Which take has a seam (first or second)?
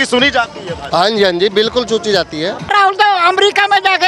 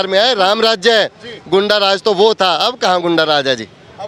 first